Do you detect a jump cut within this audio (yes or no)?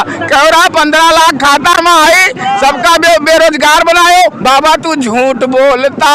no